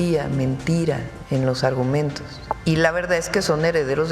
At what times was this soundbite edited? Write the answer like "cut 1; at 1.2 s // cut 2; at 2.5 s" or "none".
cut 1; at 1.1 s // cut 2; at 2.6 s